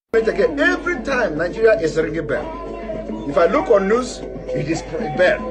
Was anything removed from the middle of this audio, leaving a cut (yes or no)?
yes